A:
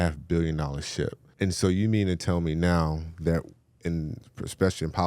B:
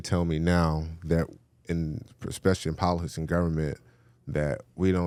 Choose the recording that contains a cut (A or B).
A